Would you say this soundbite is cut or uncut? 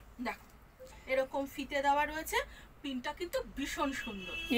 uncut